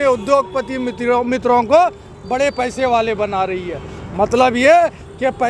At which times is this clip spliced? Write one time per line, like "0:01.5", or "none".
none